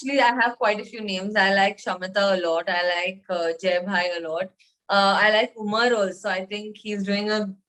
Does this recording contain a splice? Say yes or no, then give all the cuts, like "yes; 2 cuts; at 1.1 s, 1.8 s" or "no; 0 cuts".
no; 0 cuts